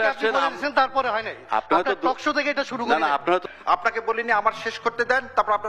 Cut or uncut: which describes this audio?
cut